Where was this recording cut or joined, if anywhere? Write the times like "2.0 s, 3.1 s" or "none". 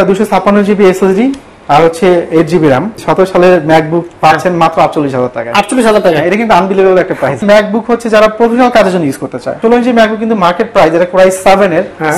3.0 s, 7.4 s, 9.5 s